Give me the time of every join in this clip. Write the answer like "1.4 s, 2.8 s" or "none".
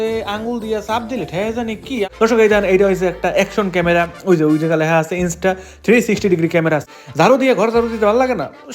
2.1 s, 6.9 s